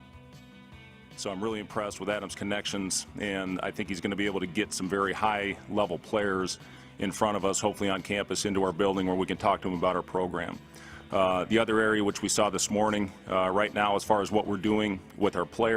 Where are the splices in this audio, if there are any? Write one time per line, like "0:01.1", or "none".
0:01.2

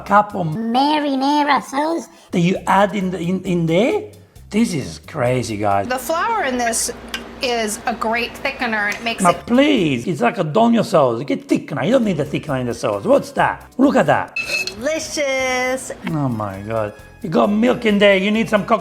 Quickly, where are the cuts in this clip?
0:05.8
0:14.3

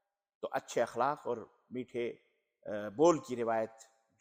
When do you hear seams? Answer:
none

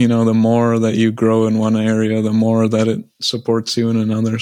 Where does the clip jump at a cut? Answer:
none

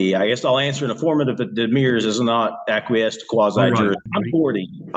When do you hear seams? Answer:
0:04.0

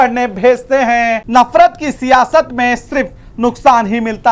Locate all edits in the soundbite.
0:01.2

